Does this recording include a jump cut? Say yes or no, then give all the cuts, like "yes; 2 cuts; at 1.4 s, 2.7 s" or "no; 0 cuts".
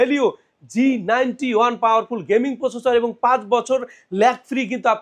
no; 0 cuts